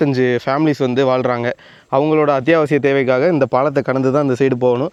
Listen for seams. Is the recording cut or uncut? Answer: uncut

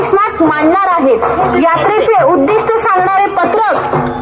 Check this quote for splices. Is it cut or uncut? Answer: uncut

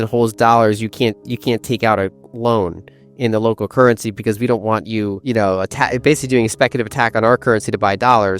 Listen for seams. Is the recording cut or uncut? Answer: cut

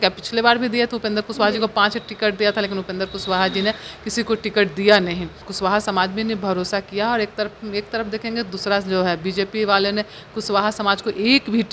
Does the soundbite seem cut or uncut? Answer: cut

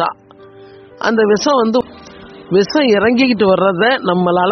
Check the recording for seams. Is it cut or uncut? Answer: cut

